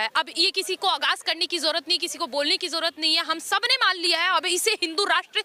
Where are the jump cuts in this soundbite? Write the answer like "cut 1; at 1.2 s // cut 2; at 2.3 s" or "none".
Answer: none